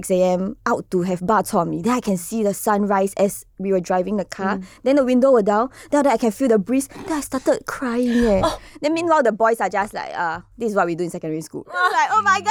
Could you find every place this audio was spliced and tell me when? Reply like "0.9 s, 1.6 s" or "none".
none